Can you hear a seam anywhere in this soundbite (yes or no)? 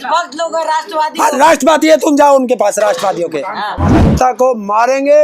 yes